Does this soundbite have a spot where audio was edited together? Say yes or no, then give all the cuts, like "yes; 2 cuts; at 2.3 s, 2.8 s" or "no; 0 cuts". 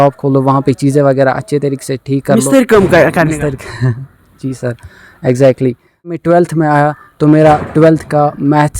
yes; 1 cut; at 6.2 s